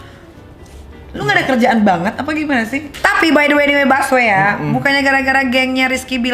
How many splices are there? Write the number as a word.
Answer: one